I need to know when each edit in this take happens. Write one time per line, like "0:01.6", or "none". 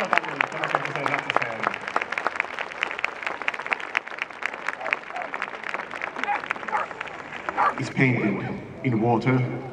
0:07.8